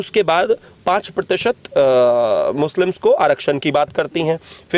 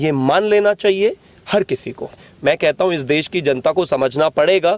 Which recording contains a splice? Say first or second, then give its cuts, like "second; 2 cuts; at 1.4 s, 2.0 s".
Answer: second; 1 cut; at 2.2 s